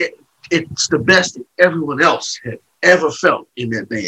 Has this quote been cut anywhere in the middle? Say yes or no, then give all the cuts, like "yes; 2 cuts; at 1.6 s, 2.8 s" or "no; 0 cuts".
no; 0 cuts